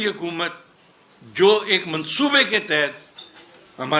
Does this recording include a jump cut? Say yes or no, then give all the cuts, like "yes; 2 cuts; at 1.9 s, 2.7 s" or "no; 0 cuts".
no; 0 cuts